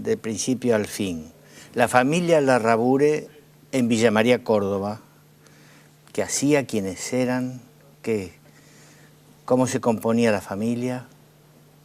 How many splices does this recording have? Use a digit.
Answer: 1